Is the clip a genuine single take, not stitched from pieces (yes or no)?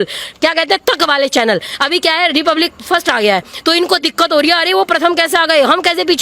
yes